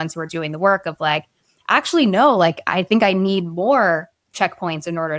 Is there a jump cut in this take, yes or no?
no